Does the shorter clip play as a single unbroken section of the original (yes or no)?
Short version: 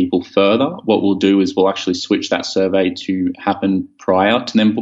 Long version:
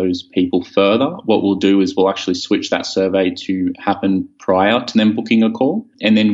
yes